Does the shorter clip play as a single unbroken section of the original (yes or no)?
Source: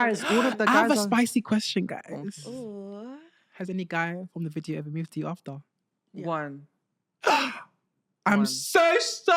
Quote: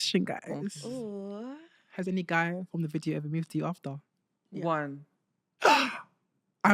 yes